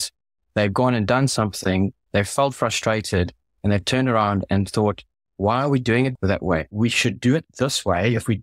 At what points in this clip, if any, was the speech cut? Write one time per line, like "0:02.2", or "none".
0:06.5